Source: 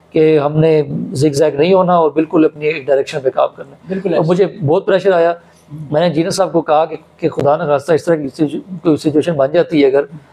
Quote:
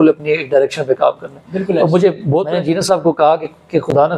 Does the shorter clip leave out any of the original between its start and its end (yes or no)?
yes